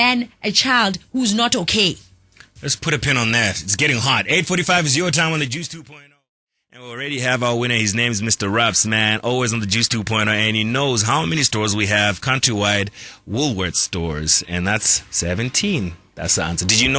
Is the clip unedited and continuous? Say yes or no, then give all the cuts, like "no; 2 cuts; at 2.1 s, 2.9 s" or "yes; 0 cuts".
yes; 0 cuts